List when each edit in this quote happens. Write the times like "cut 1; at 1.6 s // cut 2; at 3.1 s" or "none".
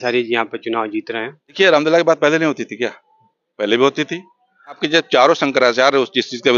cut 1; at 1.4 s // cut 2; at 4.8 s